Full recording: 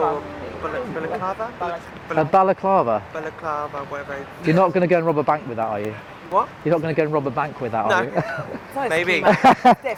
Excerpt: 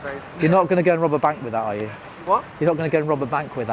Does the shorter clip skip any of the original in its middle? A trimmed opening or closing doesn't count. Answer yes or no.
no